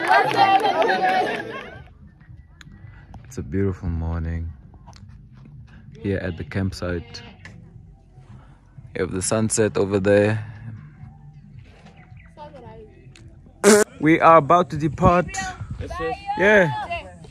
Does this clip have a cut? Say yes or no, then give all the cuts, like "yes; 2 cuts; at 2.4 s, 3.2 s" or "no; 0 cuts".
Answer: yes; 2 cuts; at 1.5 s, 13.9 s